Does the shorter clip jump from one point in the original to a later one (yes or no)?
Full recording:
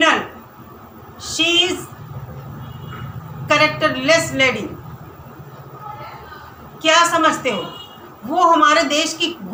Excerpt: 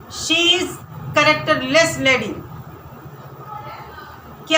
yes